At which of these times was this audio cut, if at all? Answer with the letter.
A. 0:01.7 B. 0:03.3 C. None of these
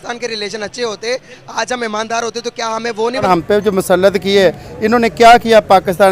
B